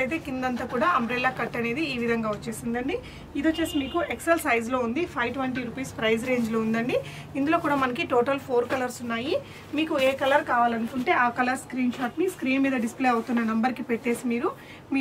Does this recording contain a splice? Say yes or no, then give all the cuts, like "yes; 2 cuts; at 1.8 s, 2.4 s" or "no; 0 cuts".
no; 0 cuts